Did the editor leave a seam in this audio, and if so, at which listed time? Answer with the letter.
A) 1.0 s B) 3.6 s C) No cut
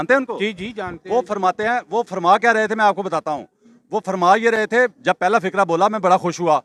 C